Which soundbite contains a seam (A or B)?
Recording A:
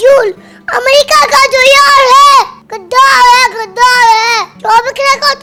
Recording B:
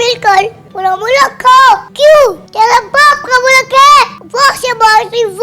B